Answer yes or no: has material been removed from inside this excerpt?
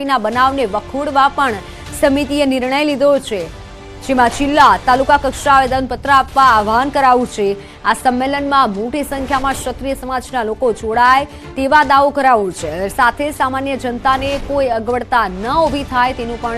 no